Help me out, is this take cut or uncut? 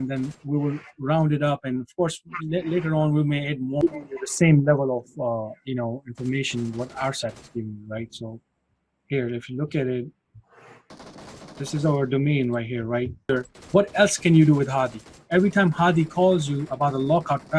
cut